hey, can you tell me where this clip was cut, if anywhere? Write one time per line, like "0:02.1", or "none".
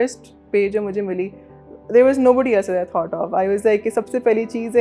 none